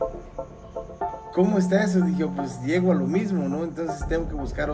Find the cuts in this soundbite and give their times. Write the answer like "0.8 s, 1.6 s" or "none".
1.3 s

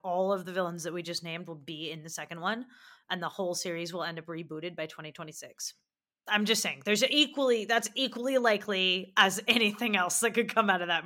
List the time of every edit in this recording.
none

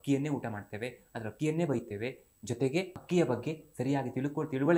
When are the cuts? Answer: none

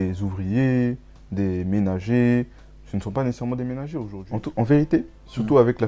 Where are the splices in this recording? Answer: 4.2 s

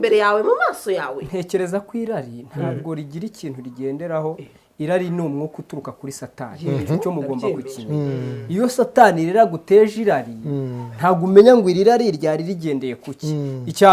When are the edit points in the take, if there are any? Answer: none

